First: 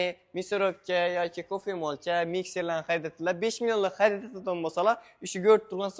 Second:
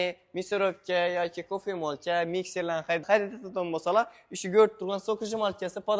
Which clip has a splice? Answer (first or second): second